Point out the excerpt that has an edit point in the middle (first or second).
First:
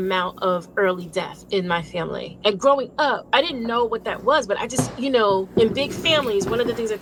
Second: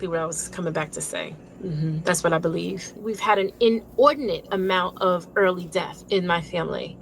second